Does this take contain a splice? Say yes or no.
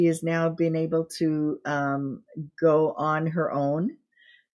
no